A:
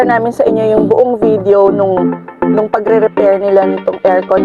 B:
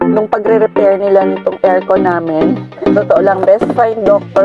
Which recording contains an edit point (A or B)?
B